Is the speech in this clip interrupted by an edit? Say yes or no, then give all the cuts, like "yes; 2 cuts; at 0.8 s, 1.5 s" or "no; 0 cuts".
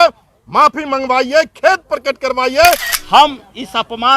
yes; 1 cut; at 2.9 s